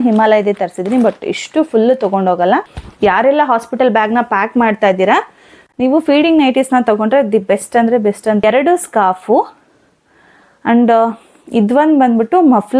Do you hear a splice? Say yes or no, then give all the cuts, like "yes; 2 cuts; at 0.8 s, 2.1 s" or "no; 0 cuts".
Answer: yes; 2 cuts; at 2.8 s, 8.4 s